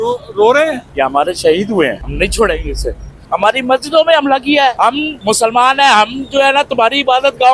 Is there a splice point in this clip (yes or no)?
yes